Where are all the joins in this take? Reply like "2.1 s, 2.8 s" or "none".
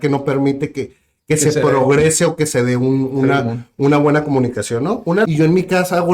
5.0 s